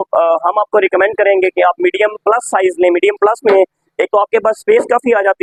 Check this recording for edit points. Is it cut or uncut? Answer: uncut